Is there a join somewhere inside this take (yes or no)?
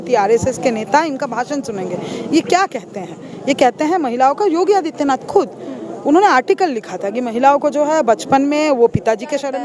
no